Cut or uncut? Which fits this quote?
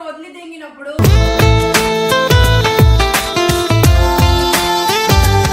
uncut